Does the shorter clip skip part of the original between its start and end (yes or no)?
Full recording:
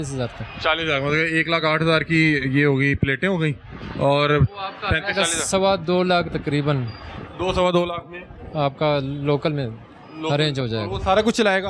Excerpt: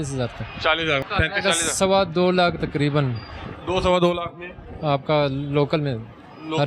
yes